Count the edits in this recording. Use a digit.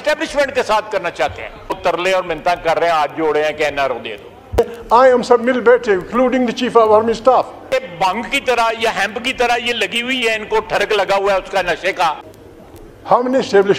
4